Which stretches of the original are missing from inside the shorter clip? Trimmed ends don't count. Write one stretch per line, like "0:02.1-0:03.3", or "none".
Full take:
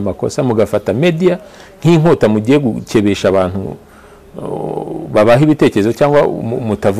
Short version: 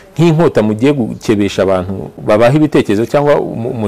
0:03.8-0:05.0

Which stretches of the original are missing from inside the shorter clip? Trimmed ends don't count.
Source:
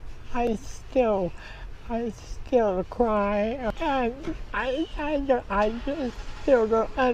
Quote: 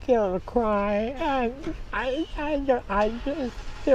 0:03.6-0:03.8

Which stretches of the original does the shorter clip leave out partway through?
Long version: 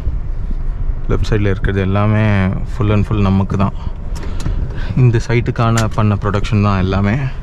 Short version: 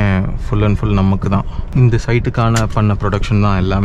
0:03.9-0:04.8

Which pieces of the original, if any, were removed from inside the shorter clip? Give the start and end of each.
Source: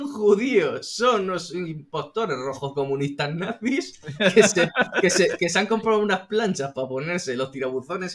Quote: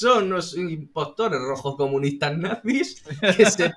none

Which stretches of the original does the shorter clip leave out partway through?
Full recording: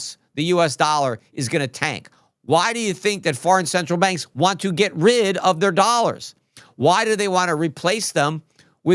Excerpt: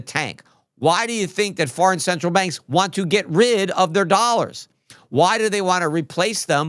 none

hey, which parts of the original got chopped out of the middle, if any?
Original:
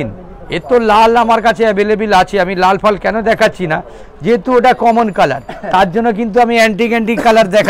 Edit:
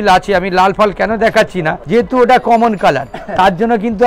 0:03.8-0:04.1

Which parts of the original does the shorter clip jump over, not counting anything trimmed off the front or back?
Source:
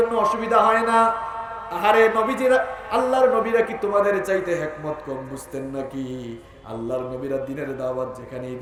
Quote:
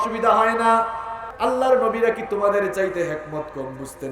0:01.5-0:02.8

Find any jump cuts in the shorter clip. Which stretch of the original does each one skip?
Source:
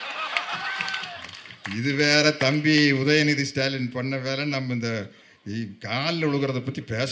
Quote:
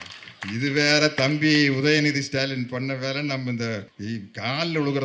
0:05.1-0:05.4

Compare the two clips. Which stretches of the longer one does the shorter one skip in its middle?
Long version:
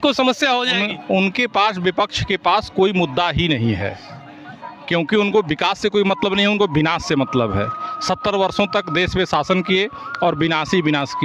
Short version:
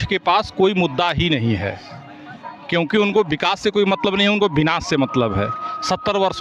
none

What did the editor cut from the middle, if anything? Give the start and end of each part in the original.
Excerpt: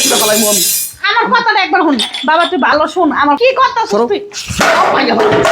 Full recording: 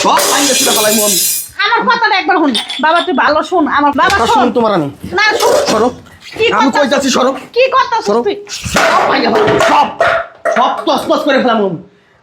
0:03.9-0:07.5

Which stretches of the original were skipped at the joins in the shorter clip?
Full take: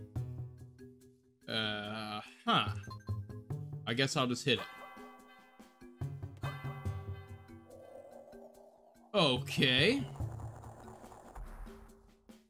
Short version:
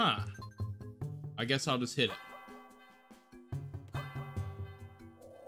none

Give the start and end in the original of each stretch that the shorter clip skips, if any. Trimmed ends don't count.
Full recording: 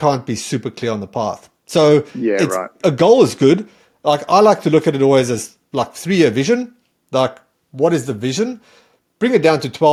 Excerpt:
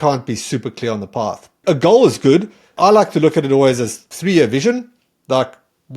0:01.5-0:02.7
0:03.9-0:04.2
0:05.6-0:05.9

